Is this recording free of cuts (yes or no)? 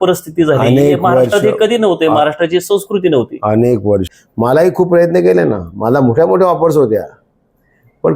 no